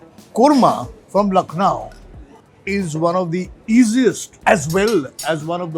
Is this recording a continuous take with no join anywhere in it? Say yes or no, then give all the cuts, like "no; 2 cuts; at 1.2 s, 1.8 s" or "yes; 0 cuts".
no; 2 cuts; at 0.9 s, 4.3 s